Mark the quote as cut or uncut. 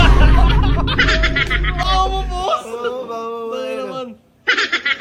uncut